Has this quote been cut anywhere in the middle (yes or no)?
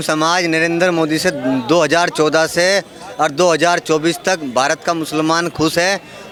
no